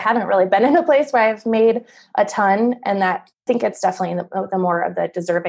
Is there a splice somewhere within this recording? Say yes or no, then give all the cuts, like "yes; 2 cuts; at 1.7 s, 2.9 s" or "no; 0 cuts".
yes; 1 cut; at 3.4 s